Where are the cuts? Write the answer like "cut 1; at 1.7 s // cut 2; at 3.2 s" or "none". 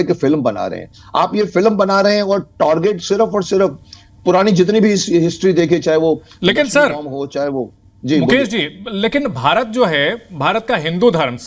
none